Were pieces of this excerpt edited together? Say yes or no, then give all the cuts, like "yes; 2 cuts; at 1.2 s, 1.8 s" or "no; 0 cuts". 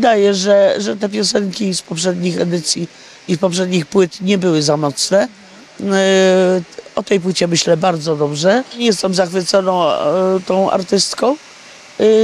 yes; 1 cut; at 8.8 s